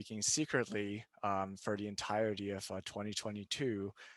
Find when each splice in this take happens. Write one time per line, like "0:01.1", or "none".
none